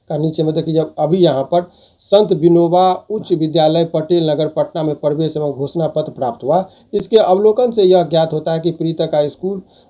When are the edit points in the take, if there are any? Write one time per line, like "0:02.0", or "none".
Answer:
none